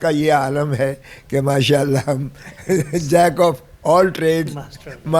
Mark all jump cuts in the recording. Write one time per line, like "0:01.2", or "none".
none